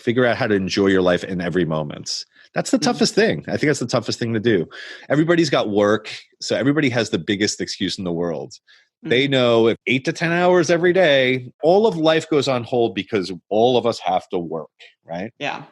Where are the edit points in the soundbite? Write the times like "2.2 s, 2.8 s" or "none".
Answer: 9.8 s, 11.6 s